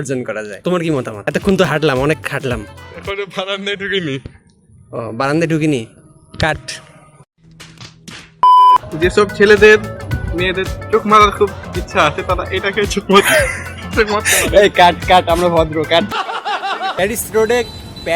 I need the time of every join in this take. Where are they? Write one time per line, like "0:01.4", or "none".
0:08.9
0:16.9